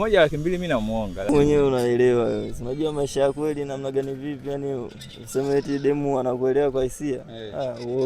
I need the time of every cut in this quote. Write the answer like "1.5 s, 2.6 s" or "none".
1.3 s

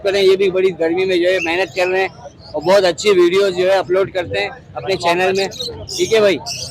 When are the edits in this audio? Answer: none

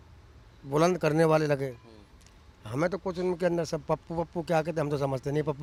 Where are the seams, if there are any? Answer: none

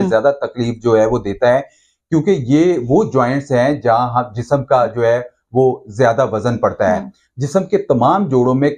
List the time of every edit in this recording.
none

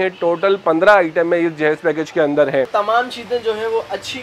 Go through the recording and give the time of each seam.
2.7 s

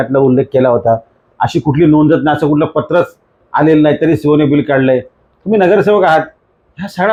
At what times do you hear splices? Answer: none

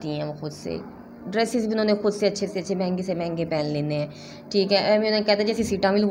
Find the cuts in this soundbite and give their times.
none

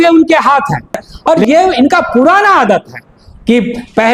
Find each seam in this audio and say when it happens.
1.1 s

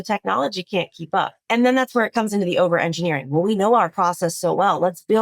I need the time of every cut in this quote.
1.4 s

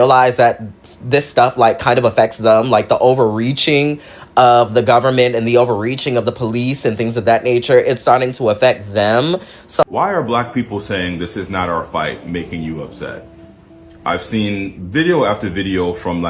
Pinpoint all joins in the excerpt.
9.8 s

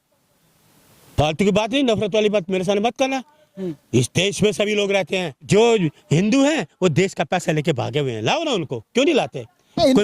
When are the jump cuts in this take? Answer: 5.5 s

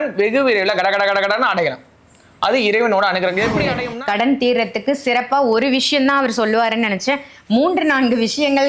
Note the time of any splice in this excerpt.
3.8 s

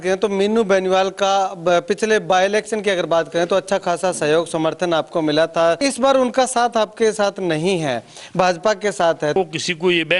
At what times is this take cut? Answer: 5.8 s, 9.4 s

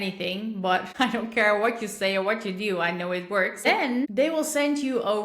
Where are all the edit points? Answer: 3.7 s

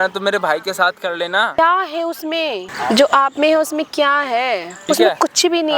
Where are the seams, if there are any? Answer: 1.5 s, 2.7 s, 4.7 s

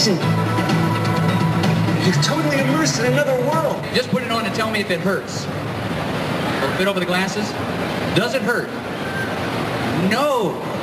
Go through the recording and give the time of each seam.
none

